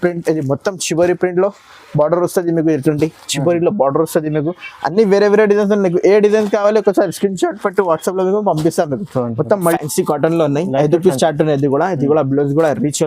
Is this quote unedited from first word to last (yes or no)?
no